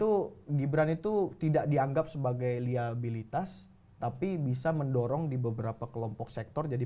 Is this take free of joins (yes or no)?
yes